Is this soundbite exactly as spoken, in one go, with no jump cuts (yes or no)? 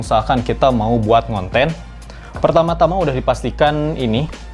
yes